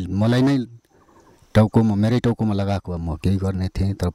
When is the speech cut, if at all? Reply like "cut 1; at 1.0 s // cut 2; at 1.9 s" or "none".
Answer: none